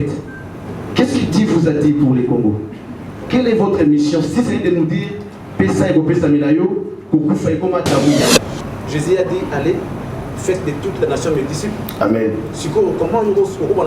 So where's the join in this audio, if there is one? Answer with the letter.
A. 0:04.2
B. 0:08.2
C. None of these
B